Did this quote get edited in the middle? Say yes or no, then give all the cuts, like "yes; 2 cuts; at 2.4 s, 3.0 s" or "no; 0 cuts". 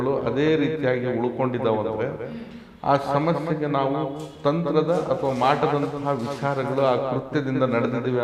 no; 0 cuts